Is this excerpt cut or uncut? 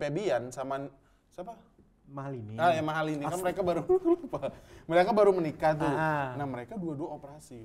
uncut